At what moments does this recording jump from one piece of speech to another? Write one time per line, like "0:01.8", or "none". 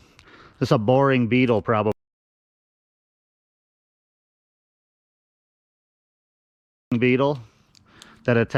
none